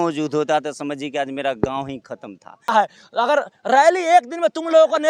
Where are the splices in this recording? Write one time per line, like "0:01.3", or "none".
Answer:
0:02.7